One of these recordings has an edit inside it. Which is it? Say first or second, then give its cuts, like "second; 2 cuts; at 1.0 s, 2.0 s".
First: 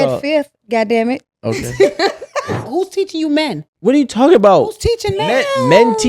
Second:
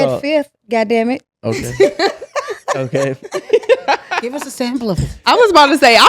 first; 2 cuts; at 2.7 s, 3.7 s